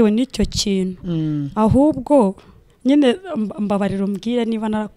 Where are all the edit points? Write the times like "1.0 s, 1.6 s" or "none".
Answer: none